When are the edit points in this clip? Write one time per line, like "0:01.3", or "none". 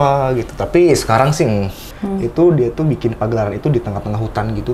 0:01.9